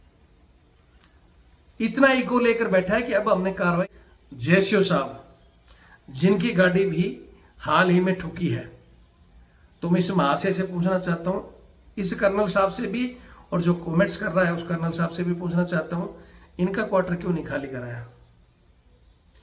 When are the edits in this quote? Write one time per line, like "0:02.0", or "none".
0:03.9